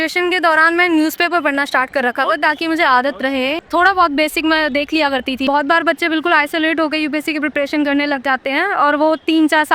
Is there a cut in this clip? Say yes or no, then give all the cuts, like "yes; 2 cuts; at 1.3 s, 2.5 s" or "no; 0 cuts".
yes; 2 cuts; at 3.6 s, 5.4 s